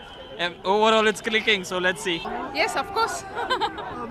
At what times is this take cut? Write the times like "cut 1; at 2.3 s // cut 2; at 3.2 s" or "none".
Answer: cut 1; at 2.2 s